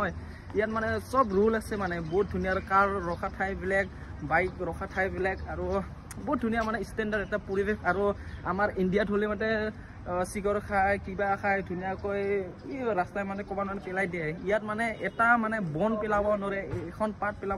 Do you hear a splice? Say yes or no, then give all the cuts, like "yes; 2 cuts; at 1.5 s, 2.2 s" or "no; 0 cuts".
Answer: no; 0 cuts